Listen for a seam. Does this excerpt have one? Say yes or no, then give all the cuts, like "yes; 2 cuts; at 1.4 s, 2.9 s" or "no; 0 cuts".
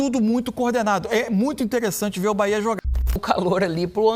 yes; 1 cut; at 2.8 s